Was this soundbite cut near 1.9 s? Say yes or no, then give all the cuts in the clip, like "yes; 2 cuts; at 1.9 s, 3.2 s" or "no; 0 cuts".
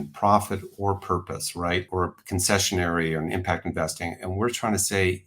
yes; 1 cut; at 1.9 s